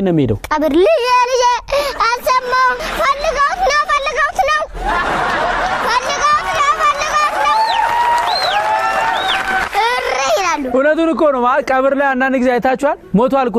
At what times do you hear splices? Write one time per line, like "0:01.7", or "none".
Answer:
none